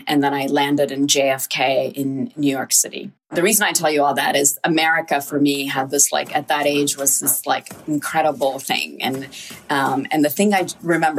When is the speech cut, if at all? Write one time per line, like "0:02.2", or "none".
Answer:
0:03.3